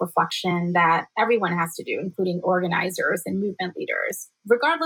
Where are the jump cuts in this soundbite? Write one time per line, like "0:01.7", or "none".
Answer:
none